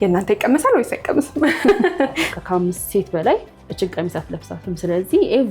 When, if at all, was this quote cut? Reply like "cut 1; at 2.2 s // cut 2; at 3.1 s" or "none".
cut 1; at 2.3 s